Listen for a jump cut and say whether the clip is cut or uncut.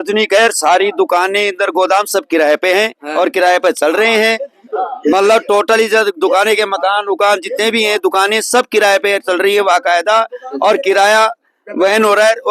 uncut